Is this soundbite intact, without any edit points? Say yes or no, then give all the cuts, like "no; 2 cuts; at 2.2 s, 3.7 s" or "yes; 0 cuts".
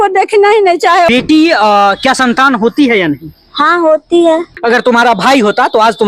no; 2 cuts; at 1.1 s, 4.5 s